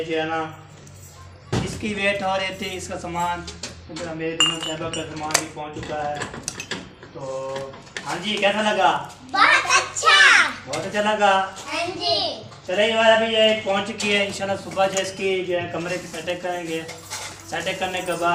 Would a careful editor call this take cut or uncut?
uncut